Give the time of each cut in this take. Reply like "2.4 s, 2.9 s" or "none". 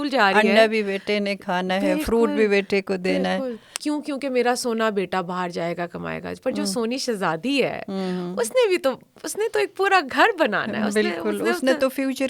3.6 s